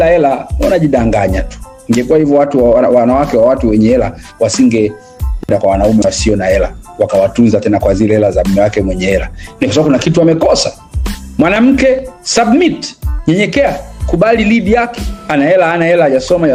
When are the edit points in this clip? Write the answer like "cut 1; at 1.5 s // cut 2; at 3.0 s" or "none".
none